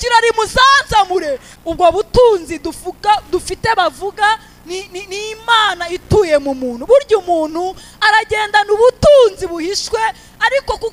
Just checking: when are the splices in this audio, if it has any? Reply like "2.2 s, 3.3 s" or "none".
1.5 s